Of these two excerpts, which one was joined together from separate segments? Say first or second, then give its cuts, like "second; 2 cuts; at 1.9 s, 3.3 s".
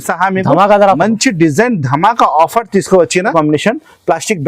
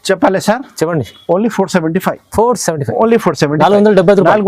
first; 1 cut; at 3.3 s